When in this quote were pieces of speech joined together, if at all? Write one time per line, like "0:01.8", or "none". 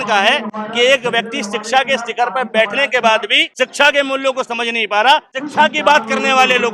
0:03.4
0:05.4